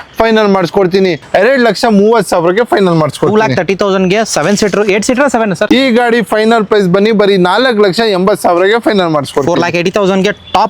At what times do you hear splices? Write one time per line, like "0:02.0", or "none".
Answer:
0:01.2
0:05.6